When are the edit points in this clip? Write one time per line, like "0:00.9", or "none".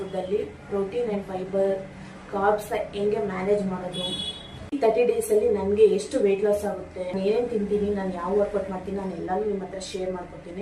0:04.8
0:07.1